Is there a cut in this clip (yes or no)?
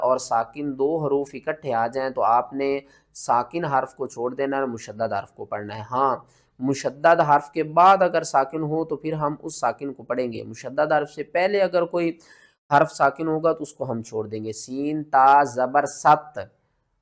no